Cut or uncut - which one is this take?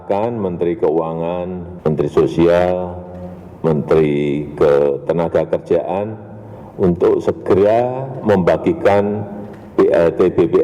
cut